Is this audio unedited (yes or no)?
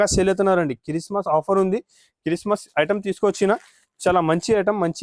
yes